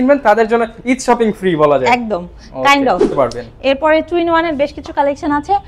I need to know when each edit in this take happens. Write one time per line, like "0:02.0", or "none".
0:03.1